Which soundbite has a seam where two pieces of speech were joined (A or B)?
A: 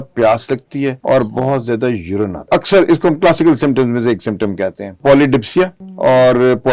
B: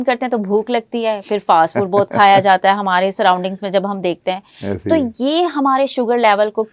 A